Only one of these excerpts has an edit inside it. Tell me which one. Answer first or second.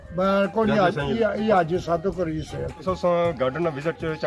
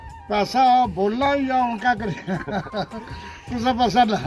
first